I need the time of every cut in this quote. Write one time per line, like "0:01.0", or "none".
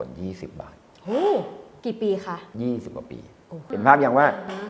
0:02.0
0:03.7